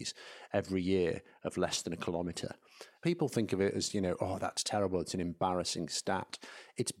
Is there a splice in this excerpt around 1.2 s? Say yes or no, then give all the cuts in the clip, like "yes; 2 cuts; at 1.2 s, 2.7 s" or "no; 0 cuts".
no; 1 cut; at 2.9 s